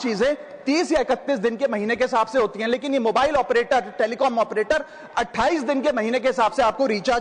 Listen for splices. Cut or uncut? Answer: uncut